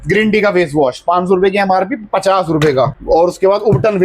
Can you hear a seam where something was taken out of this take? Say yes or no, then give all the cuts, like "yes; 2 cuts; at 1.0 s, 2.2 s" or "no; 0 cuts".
no; 0 cuts